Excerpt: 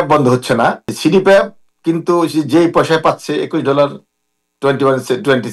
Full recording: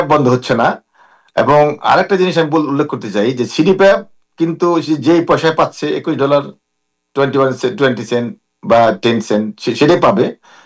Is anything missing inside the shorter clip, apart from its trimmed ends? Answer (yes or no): yes